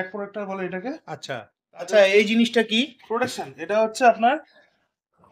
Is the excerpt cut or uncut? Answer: cut